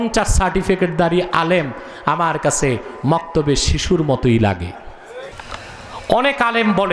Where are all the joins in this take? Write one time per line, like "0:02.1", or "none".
0:05.2